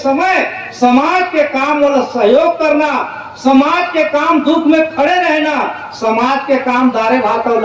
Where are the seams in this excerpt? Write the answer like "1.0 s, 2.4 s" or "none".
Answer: none